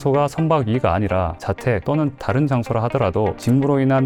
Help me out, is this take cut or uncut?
uncut